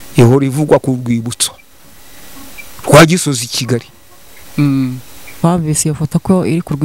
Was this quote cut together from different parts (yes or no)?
yes